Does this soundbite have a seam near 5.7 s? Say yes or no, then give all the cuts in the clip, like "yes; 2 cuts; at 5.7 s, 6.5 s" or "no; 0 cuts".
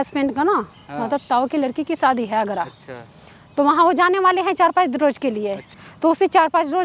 yes; 1 cut; at 5.7 s